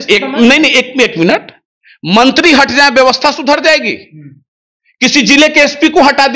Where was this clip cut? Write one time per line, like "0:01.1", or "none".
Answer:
none